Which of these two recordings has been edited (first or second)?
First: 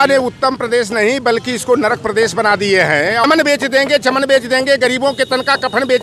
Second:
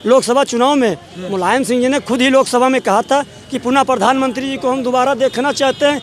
first